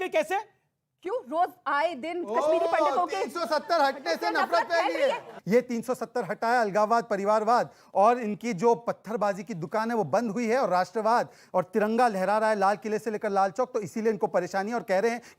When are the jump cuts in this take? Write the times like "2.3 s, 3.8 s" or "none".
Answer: 5.3 s